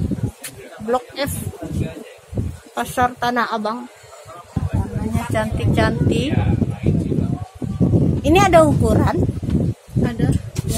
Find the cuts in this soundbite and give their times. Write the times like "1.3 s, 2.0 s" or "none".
4.6 s

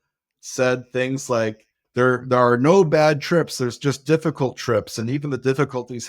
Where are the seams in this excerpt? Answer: 1.8 s

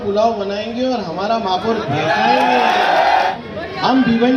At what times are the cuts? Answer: 3.3 s

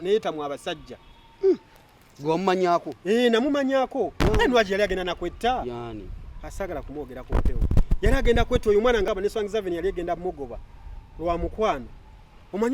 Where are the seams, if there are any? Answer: 9.1 s

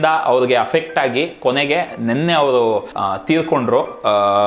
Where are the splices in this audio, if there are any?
2.9 s

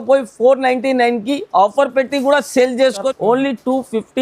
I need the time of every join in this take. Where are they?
3.1 s

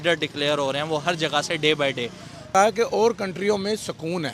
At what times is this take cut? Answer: 2.5 s

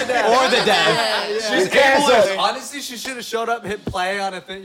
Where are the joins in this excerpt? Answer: 2.3 s

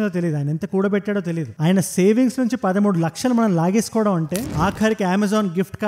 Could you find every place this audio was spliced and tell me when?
4.5 s

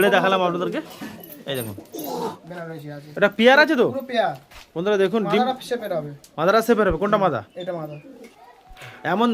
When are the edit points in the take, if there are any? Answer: 2.4 s, 8.2 s

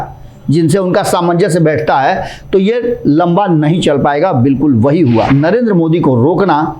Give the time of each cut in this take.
5.3 s

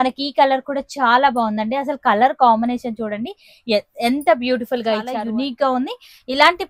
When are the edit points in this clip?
5.1 s

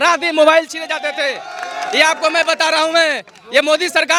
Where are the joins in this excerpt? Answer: none

